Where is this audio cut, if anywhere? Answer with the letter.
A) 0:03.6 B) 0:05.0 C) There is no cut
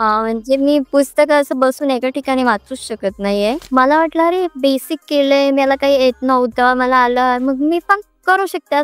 A